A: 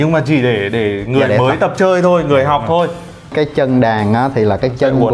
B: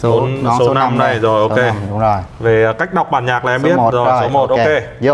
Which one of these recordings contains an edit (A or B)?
A